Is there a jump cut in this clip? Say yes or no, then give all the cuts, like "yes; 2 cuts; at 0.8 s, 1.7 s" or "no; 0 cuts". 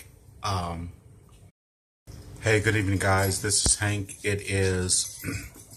no; 0 cuts